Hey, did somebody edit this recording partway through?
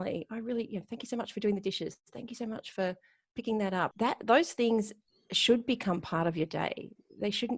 yes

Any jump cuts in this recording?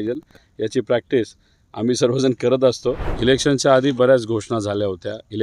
yes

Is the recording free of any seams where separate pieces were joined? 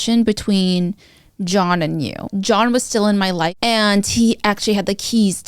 no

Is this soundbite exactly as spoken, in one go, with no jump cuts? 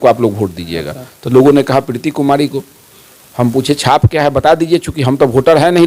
yes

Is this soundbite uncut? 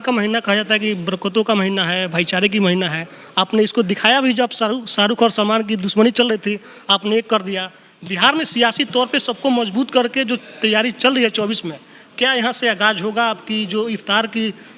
yes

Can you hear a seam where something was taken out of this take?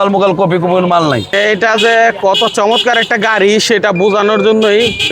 yes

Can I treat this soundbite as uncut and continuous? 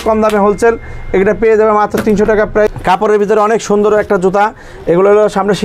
no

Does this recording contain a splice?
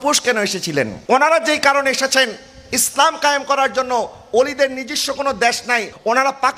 no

